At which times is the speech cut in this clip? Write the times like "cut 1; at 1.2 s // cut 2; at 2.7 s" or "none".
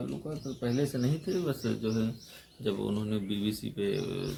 none